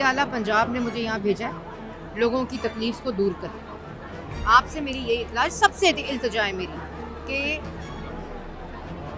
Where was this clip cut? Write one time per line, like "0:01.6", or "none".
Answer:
none